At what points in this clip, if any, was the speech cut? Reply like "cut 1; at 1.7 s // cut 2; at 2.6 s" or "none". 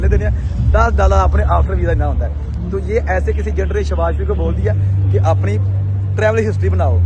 none